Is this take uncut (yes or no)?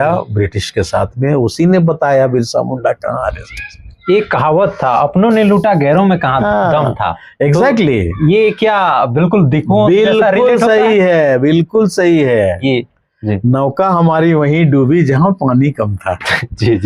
yes